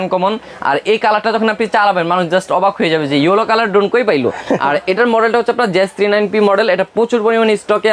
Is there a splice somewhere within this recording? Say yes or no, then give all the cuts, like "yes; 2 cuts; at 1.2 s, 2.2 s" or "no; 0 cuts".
no; 0 cuts